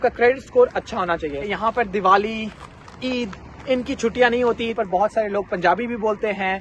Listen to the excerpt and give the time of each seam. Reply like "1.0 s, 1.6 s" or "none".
1.4 s, 4.7 s